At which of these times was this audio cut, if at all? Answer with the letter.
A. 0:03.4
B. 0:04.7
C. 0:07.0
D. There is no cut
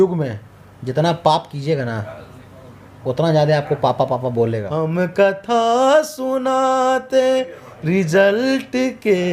B